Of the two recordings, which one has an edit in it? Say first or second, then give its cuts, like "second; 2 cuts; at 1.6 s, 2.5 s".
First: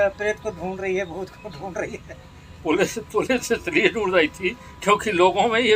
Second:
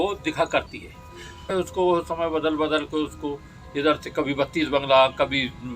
second; 1 cut; at 1.5 s